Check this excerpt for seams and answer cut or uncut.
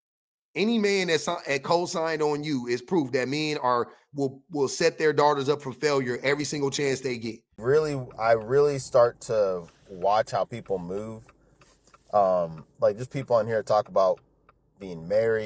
cut